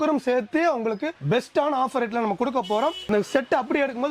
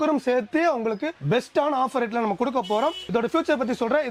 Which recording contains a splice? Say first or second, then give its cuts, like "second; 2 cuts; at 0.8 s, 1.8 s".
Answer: first; 1 cut; at 3.0 s